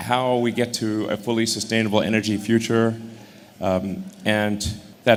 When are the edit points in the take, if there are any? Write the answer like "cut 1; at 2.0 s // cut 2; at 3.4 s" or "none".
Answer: none

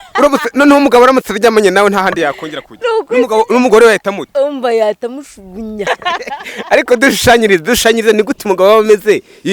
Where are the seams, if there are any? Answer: cut 1; at 5.9 s

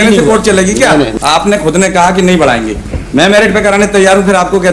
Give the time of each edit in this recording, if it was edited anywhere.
cut 1; at 1.2 s

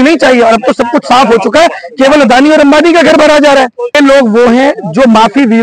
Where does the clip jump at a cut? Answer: cut 1; at 3.9 s

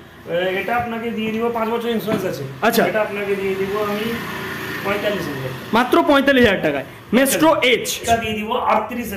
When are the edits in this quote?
cut 1; at 8.0 s

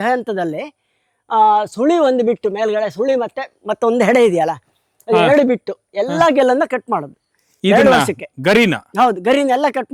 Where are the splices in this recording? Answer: none

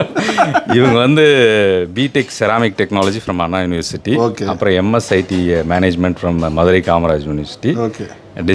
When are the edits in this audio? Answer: none

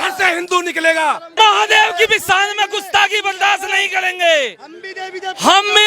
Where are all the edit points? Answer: cut 1; at 1.3 s

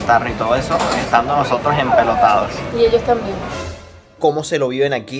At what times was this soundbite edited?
cut 1; at 3.6 s

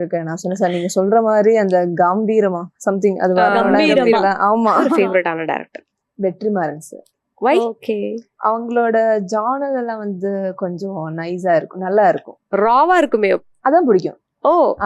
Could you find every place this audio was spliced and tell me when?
cut 1; at 4.9 s

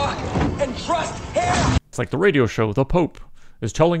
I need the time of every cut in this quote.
cut 1; at 2.0 s

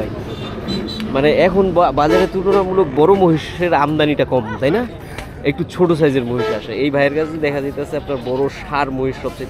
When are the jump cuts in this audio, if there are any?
none

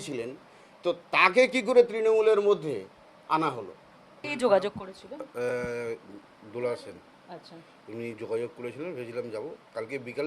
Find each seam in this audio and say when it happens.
cut 1; at 4.1 s

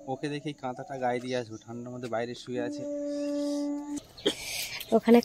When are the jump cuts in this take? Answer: cut 1; at 3.9 s

